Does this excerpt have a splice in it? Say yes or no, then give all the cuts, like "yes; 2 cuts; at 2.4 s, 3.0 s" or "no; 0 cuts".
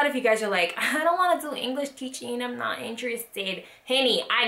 no; 0 cuts